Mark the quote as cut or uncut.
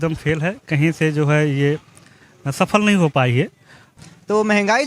cut